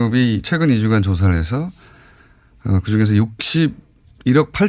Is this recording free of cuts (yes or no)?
yes